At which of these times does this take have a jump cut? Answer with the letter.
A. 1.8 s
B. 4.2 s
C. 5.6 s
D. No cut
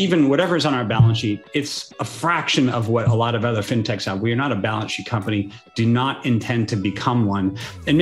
A